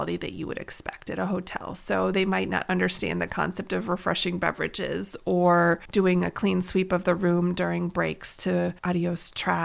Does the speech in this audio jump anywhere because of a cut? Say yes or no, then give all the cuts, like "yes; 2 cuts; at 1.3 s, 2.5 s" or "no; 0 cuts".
yes; 2 cuts; at 5.8 s, 8.8 s